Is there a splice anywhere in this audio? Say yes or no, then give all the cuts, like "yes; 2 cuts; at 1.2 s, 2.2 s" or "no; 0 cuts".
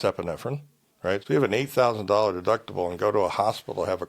yes; 1 cut; at 1.2 s